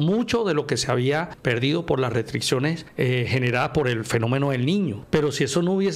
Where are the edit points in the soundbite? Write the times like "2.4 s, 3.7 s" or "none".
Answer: 1.3 s, 2.8 s, 5.0 s